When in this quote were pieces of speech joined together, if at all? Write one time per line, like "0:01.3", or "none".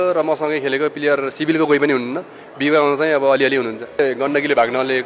0:04.0